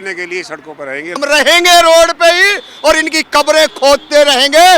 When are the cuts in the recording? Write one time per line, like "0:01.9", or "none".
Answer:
0:01.1